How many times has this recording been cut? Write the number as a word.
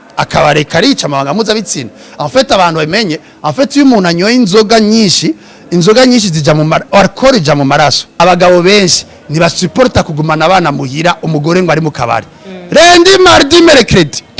one